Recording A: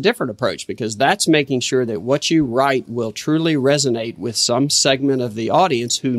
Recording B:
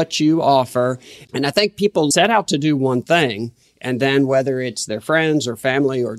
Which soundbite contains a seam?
B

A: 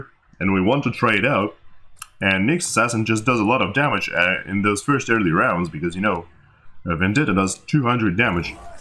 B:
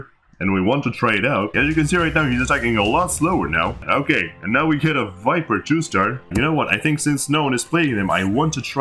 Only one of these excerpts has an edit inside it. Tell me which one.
B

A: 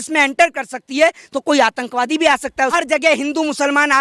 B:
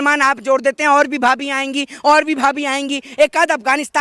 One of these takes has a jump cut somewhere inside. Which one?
A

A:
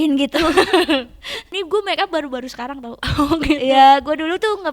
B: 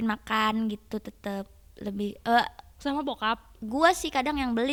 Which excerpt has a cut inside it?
A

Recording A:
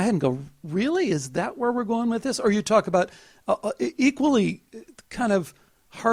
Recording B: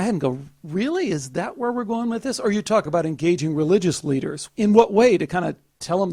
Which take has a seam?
B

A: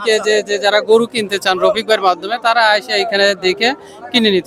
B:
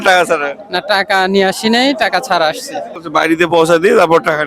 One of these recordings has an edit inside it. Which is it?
B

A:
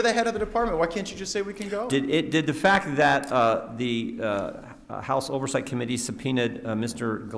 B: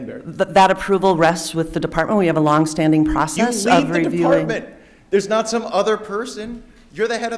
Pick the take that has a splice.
A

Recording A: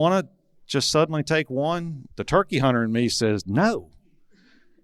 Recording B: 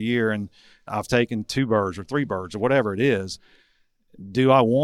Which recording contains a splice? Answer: A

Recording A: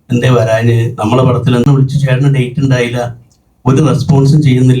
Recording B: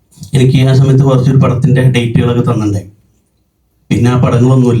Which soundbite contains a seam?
A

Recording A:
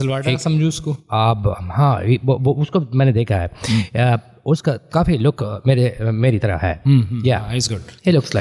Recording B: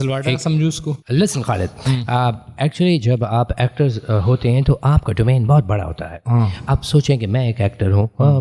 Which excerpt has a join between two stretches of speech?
B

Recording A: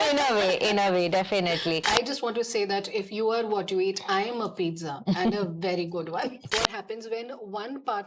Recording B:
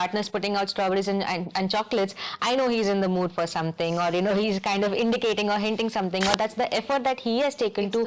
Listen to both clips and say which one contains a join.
A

